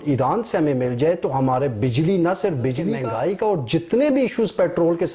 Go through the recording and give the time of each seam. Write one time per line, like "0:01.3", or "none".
0:03.0